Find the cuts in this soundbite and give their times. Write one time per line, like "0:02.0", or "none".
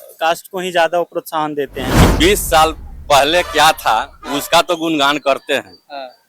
0:02.0